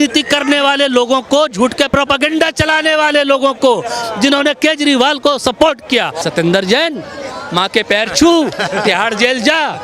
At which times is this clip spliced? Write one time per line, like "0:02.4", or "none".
0:01.9
0:06.1